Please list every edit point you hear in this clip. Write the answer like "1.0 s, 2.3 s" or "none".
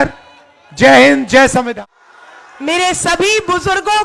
1.7 s

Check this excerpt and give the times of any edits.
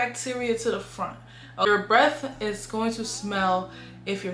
1.7 s

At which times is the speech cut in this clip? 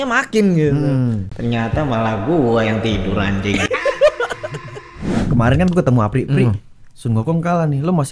5.1 s

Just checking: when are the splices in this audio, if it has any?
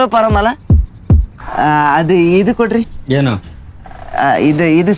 1.2 s

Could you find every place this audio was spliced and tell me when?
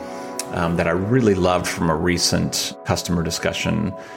2.7 s

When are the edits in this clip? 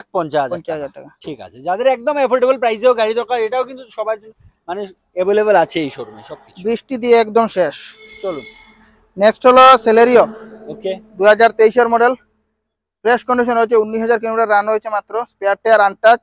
none

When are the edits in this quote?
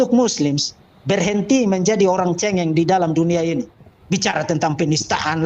3.7 s

